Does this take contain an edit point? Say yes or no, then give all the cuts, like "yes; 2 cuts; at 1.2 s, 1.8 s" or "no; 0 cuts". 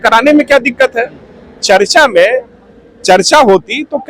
no; 0 cuts